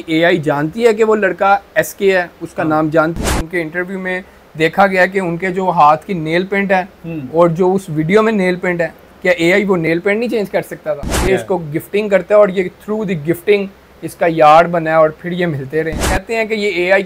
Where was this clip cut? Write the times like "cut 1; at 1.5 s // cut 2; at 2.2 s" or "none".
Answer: cut 1; at 3.2 s // cut 2; at 11.2 s // cut 3; at 16.1 s

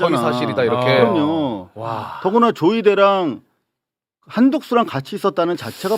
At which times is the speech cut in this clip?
none

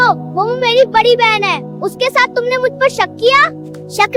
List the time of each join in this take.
none

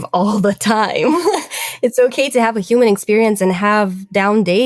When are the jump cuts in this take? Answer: none

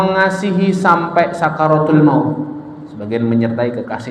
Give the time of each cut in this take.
none

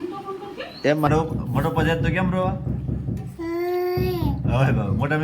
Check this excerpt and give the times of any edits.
cut 1; at 1.1 s

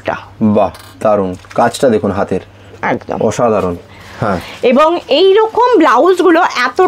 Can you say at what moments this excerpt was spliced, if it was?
none

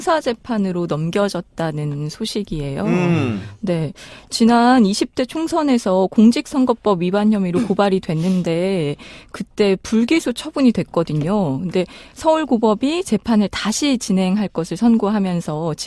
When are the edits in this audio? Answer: cut 1; at 14.7 s

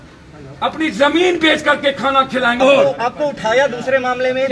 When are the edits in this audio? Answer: cut 1; at 2.6 s

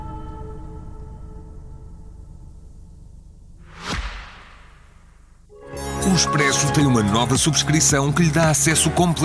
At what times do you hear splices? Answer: none

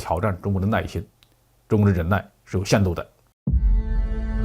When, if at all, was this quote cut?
cut 1; at 3.2 s

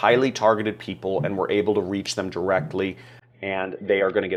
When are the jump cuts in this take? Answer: none

